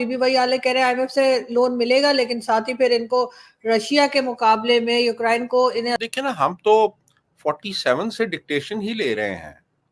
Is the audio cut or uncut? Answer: cut